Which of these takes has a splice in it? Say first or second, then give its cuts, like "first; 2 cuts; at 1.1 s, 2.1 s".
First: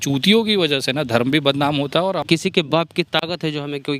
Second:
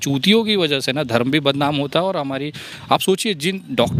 first; 1 cut; at 2.2 s